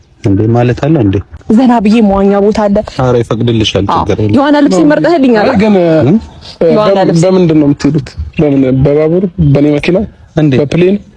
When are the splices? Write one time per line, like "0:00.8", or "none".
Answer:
0:01.3